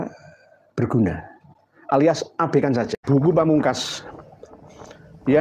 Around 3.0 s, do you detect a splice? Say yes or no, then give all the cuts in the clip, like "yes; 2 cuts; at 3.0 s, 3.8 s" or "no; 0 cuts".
yes; 1 cut; at 3.0 s